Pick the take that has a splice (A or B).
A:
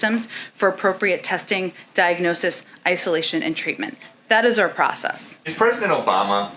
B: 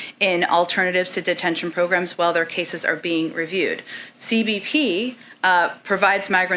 A